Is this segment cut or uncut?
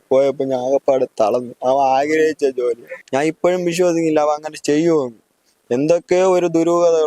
cut